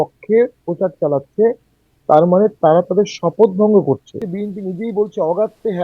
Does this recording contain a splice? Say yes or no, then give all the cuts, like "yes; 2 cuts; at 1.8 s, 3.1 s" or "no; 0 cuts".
yes; 1 cut; at 4.3 s